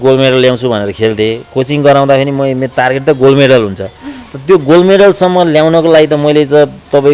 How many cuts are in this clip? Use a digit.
0